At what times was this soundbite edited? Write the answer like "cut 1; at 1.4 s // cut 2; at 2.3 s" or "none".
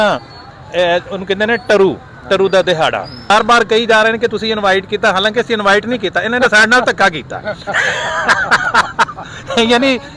cut 1; at 3.3 s